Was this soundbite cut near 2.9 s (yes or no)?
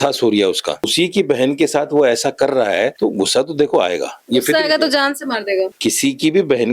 yes